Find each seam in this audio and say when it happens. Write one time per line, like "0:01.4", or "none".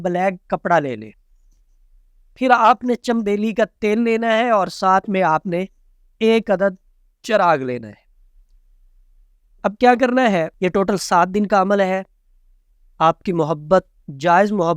0:10.5